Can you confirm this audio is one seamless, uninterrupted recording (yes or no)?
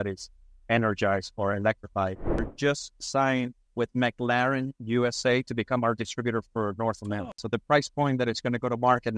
no